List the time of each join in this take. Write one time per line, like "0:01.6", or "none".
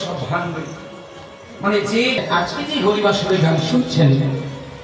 0:02.2